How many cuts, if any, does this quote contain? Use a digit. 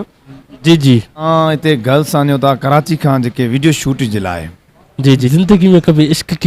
2